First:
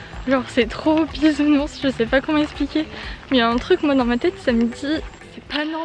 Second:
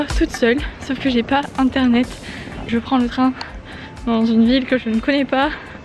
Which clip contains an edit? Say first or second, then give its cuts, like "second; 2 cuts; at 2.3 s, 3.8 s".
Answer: second; 1 cut; at 2.7 s